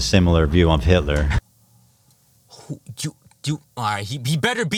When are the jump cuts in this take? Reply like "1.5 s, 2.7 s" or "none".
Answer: none